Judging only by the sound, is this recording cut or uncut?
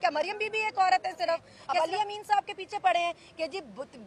cut